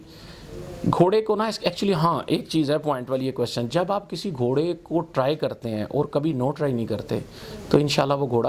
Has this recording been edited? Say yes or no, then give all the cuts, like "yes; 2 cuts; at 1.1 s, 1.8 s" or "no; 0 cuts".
no; 0 cuts